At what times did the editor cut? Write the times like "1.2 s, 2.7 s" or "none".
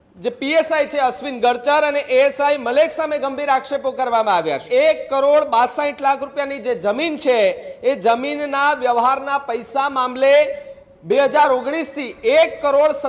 4.6 s